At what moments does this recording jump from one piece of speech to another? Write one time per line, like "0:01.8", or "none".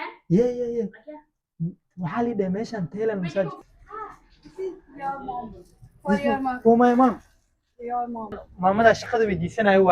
0:03.6
0:08.5